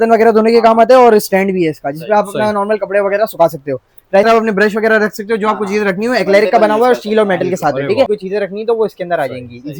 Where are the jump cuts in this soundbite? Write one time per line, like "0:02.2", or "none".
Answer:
0:04.2
0:08.1